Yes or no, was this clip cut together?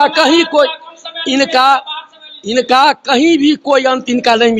no